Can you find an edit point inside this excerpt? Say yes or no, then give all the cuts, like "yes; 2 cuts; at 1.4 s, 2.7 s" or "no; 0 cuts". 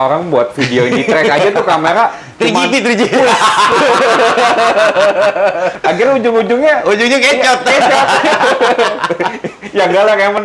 yes; 1 cut; at 5.7 s